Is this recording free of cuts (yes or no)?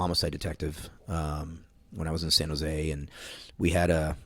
yes